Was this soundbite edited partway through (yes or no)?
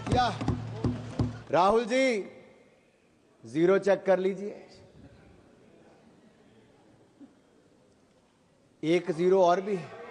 yes